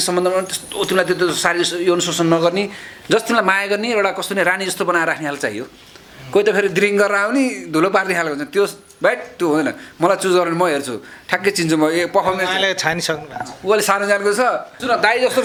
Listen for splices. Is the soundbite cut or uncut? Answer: uncut